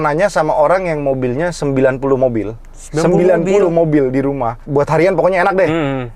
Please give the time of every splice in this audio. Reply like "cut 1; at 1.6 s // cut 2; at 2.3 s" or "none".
cut 1; at 4.6 s